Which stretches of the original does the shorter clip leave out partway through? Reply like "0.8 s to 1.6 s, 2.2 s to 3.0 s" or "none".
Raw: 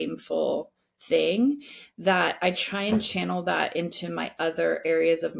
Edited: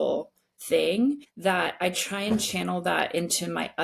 1.7 s to 1.9 s